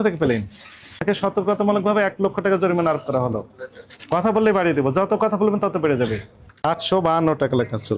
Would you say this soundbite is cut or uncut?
cut